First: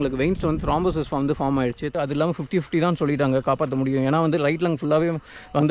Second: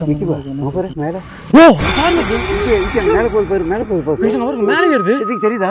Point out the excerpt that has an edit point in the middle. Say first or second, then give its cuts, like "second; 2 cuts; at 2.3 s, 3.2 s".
first; 1 cut; at 1.9 s